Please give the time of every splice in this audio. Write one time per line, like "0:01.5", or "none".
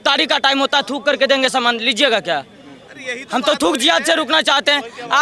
0:02.8